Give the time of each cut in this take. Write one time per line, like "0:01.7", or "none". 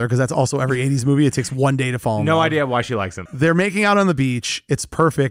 0:03.2